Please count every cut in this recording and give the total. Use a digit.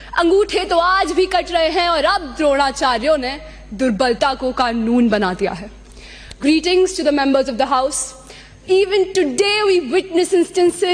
0